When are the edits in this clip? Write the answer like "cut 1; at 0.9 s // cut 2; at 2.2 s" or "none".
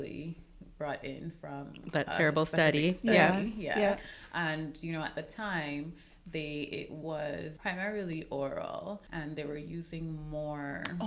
cut 1; at 7.5 s // cut 2; at 9.1 s